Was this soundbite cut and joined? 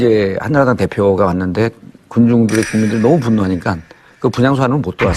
yes; 1 cut; at 2.3 s

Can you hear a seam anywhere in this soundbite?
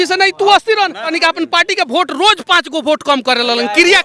yes; 1 cut; at 1.1 s

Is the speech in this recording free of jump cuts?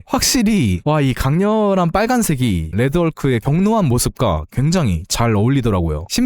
no; 1 cut; at 2.7 s

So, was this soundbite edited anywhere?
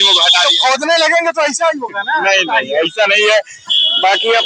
no; 0 cuts

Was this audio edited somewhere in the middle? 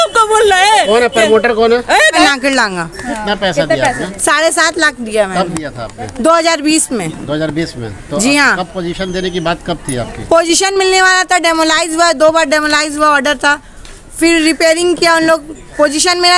yes; 1 cut; at 2.1 s

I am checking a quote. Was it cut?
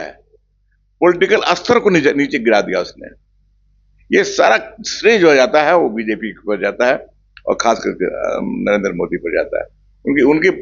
no; 0 cuts

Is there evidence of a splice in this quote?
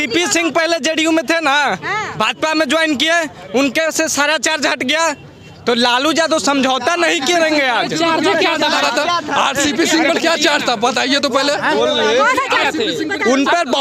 no; 0 cuts

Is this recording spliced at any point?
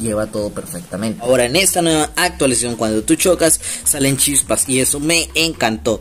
yes; 1 cut; at 1.3 s

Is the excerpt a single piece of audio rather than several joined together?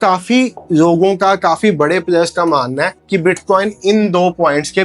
yes; 0 cuts

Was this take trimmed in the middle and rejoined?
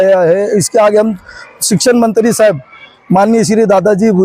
no; 0 cuts

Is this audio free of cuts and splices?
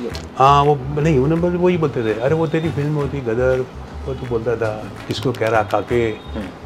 yes; 0 cuts

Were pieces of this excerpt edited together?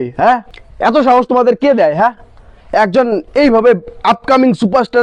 no; 0 cuts

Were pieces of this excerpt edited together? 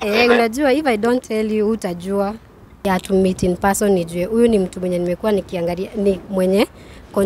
yes; 1 cut; at 2.7 s

